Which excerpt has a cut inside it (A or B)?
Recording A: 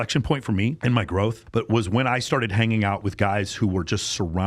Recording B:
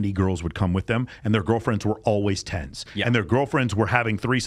A